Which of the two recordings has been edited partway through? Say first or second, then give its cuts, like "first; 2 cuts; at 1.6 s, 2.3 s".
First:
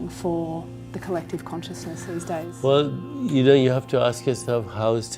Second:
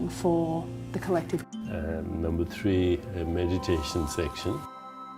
first; 1 cut; at 1.5 s